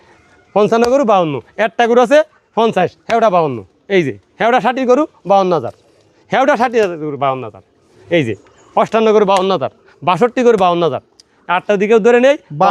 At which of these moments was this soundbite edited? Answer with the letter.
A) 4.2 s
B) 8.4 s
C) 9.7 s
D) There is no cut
D